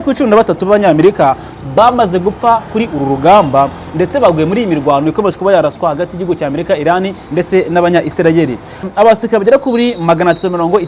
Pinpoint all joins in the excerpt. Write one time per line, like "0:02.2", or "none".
0:08.9